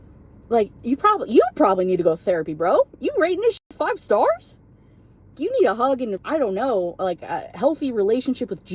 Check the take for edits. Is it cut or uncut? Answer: cut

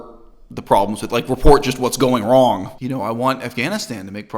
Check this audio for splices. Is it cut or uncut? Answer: cut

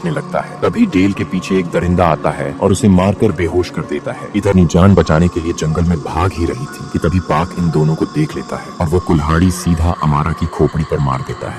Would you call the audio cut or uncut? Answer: cut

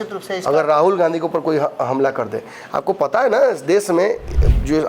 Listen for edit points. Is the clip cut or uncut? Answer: uncut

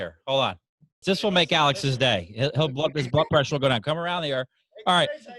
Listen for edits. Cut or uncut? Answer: cut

